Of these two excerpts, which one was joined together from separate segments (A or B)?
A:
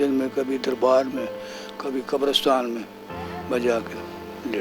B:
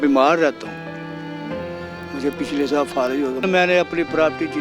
B